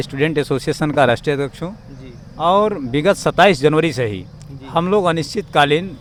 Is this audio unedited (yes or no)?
yes